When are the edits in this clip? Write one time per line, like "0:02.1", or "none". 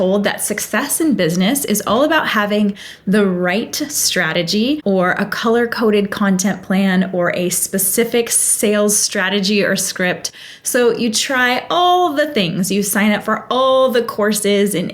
0:04.8